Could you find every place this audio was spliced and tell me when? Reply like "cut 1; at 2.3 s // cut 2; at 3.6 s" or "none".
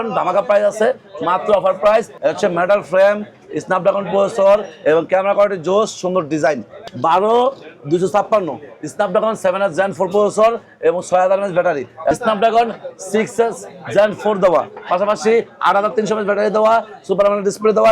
cut 1; at 2.1 s // cut 2; at 6.7 s // cut 3; at 12.1 s